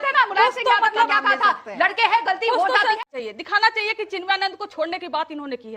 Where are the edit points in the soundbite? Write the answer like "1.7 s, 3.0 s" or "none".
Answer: 3.0 s

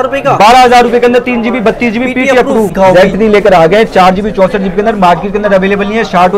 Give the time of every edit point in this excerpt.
2.7 s

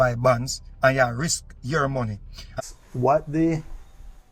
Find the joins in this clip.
2.5 s

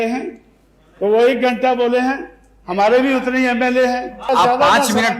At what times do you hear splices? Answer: 4.2 s

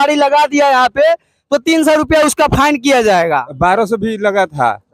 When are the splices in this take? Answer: 3.5 s

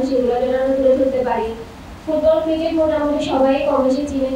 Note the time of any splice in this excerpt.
none

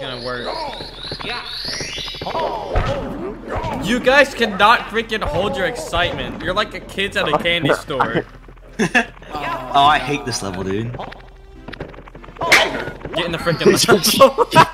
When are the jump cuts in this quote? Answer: none

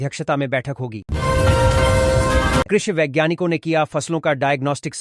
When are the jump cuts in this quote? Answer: 1.0 s, 2.7 s

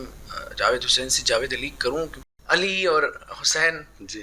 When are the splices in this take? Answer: 2.3 s

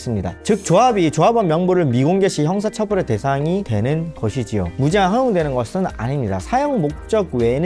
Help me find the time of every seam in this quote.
4.7 s

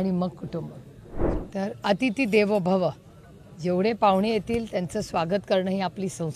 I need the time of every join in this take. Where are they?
1.2 s

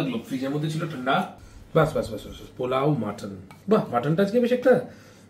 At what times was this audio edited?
1.4 s

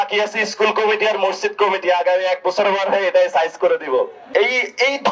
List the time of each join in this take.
4.2 s

